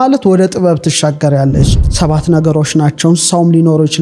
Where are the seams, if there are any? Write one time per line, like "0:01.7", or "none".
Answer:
0:01.6